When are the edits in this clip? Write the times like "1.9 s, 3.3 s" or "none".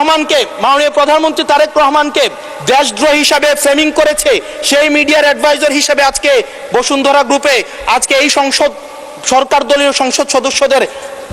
none

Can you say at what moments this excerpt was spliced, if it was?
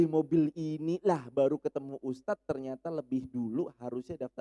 none

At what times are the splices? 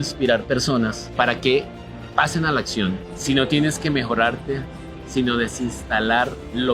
1.0 s, 3.1 s

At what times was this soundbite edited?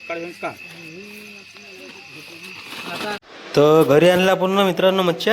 3.6 s

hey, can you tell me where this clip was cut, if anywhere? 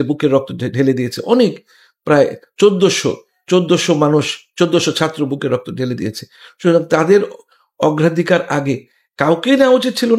9.0 s

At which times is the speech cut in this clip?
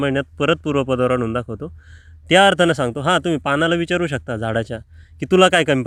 none

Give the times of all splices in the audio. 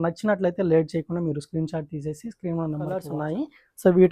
3.1 s

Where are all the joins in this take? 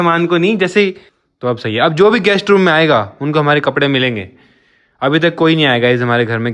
1.1 s

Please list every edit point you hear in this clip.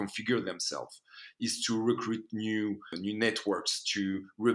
2.9 s

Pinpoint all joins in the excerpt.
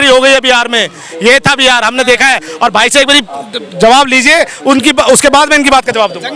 none

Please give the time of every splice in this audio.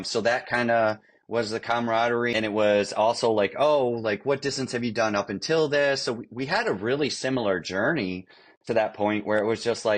2.3 s

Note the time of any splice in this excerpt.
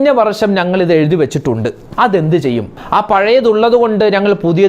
1.8 s, 2.7 s

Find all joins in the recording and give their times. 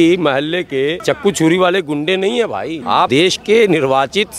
1.0 s, 3.0 s

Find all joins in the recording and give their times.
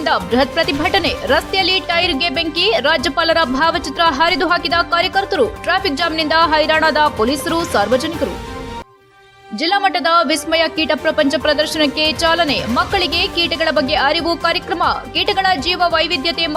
none

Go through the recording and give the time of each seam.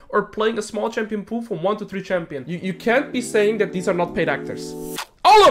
2.4 s

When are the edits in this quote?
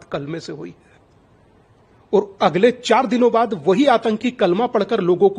none

